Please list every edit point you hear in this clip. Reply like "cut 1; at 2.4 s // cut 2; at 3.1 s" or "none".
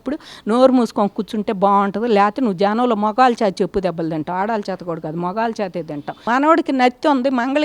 cut 1; at 6.2 s